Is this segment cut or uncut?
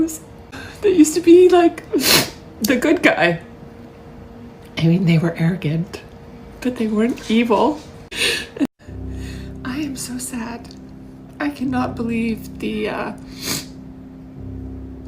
cut